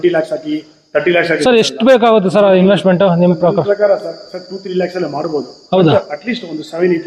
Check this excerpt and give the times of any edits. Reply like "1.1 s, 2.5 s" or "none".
none